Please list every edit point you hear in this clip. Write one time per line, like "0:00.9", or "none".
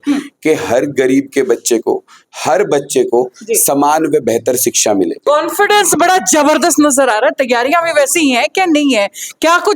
0:05.3